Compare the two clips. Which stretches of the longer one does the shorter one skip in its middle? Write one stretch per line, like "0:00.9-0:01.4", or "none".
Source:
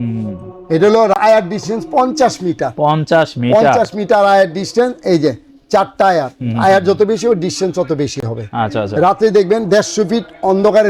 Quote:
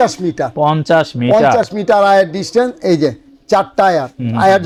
none

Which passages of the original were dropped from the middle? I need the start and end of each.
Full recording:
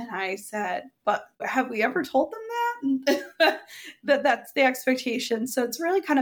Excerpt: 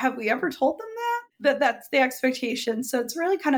0:02.8-0:03.9

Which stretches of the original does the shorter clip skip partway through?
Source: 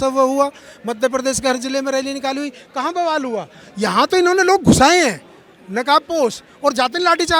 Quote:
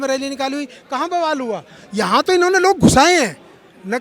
none

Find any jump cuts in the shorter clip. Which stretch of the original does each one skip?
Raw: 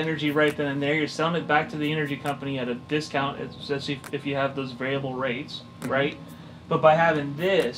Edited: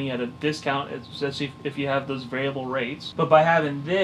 0:05.5-0:06.5

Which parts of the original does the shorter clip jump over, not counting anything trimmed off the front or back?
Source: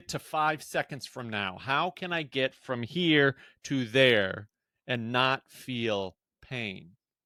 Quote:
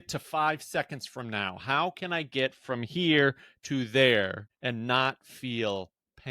0:04.5-0:04.7

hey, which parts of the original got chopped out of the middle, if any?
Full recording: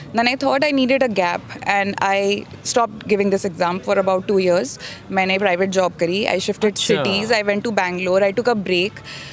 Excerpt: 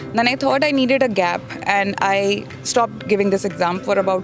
none

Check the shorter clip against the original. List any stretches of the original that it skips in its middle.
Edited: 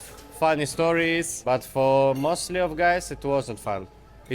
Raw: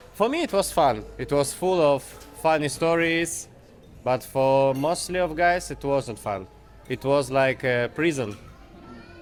0:03.4-0:03.9

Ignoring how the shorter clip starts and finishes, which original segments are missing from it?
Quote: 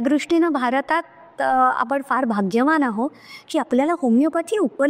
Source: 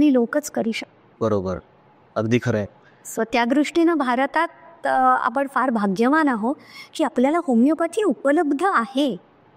none

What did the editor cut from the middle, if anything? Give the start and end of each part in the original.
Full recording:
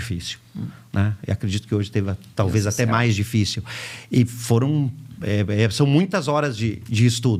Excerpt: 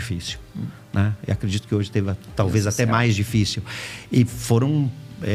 none

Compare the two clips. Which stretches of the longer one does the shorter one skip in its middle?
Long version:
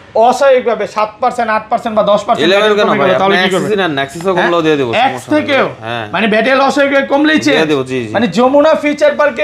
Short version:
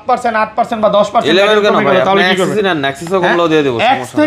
none

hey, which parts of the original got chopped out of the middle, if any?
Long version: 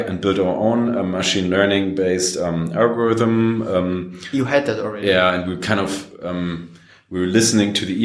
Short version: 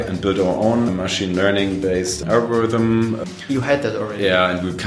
0:00.9-0:01.0
0:02.3-0:02.7
0:03.7-0:04.0

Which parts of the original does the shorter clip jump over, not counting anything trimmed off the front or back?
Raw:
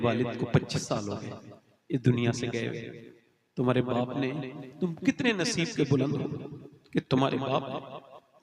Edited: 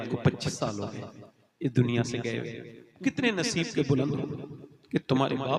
0:03.2-0:05.0

